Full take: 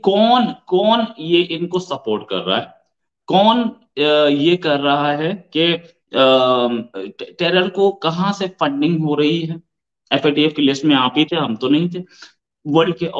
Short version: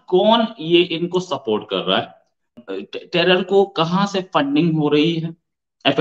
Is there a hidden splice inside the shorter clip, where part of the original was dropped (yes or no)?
yes